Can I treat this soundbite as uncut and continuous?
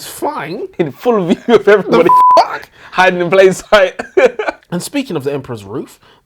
no; 1 cut; at 4.7 s

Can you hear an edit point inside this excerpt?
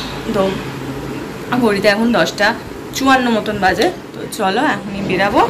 no; 0 cuts

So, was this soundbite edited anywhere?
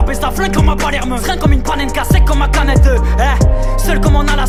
no; 0 cuts

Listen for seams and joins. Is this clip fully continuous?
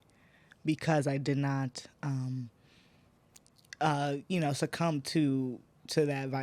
yes; 0 cuts

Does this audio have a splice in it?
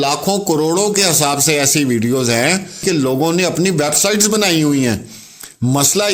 yes; 1 cut; at 2.8 s

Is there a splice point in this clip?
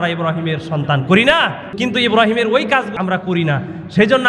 yes; 2 cuts; at 1.8 s, 2.9 s

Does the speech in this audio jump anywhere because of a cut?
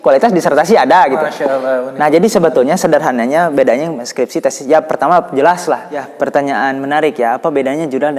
yes; 1 cut; at 6.0 s

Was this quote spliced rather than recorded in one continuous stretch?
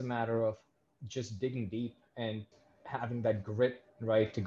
yes; 1 cut; at 2.5 s

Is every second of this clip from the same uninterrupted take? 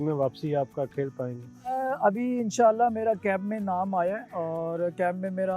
yes; 0 cuts

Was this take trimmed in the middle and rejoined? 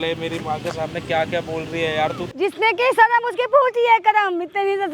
yes; 1 cut; at 2.2 s

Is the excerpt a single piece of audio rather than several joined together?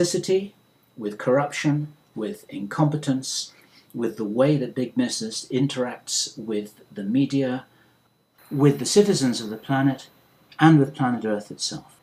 no; 1 cut; at 8.9 s

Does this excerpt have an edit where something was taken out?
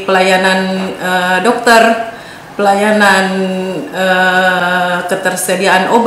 no; 0 cuts

